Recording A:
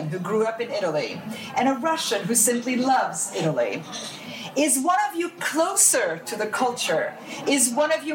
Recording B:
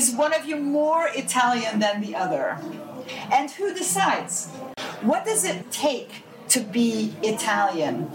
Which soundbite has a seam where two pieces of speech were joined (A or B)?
B